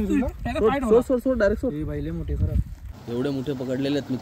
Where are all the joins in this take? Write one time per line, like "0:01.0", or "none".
0:03.0